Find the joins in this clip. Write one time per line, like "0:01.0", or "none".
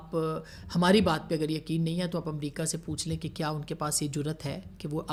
none